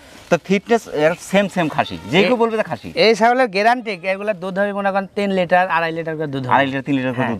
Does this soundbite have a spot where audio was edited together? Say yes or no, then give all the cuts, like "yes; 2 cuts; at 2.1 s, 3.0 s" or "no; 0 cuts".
no; 0 cuts